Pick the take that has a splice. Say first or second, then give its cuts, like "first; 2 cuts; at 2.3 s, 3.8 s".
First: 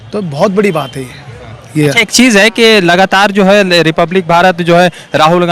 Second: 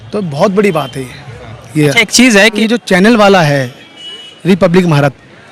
second; 1 cut; at 2.5 s